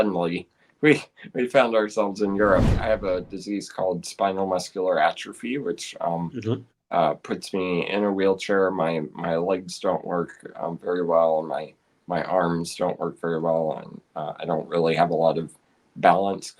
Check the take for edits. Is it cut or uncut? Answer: cut